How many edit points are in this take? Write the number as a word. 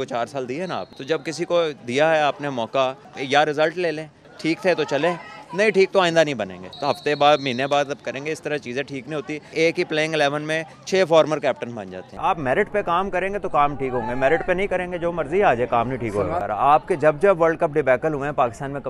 seven